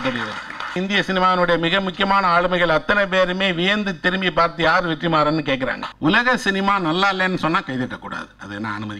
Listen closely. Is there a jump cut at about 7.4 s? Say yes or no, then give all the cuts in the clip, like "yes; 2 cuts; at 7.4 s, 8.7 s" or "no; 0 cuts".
no; 2 cuts; at 0.7 s, 5.8 s